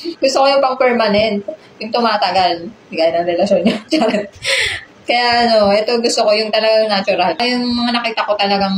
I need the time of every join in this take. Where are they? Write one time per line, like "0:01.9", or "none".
0:07.4